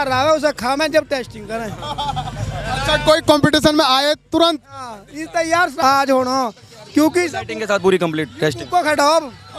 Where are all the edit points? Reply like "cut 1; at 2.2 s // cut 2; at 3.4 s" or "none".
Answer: cut 1; at 5.7 s